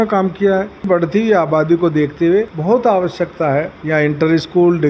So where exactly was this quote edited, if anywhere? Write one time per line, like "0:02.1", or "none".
0:00.8
0:02.5
0:03.8